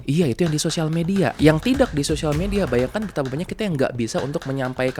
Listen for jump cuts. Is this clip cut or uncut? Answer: cut